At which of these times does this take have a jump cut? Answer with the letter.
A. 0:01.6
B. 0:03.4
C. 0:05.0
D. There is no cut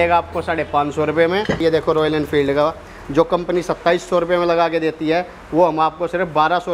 A